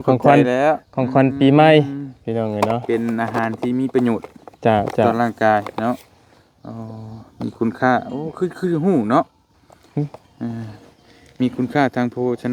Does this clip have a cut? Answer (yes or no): no